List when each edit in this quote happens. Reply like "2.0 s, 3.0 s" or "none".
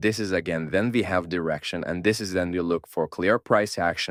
none